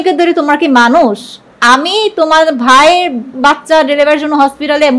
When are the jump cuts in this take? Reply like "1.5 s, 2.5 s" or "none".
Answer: 3.3 s